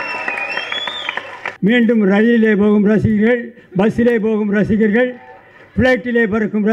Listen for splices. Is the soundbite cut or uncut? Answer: cut